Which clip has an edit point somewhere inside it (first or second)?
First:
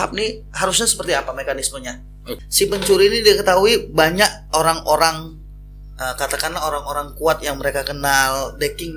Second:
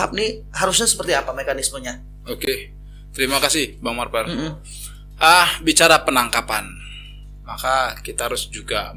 first